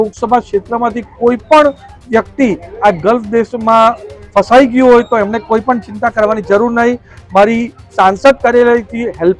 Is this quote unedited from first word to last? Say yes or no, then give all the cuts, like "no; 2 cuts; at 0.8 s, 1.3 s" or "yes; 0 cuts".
yes; 0 cuts